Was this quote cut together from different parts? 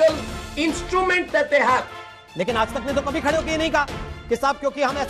yes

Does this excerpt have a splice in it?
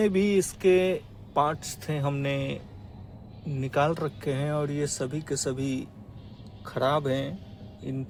no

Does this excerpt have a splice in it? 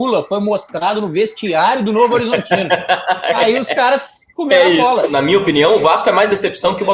yes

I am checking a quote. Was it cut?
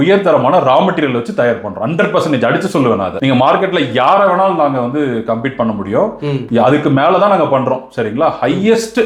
no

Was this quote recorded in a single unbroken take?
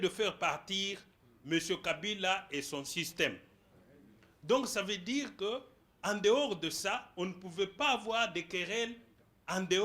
yes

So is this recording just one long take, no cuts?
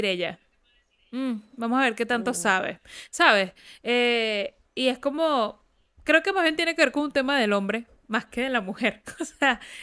yes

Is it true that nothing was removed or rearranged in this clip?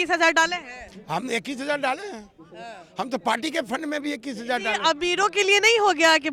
yes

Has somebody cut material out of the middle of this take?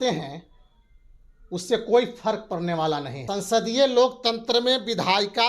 yes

